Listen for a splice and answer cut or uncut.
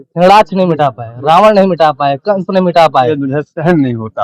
cut